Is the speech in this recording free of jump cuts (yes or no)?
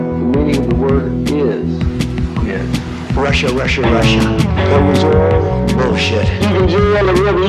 yes